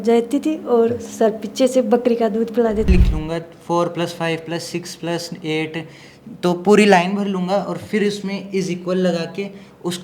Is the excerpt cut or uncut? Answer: cut